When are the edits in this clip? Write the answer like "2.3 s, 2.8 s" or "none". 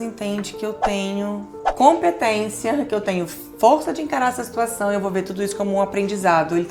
none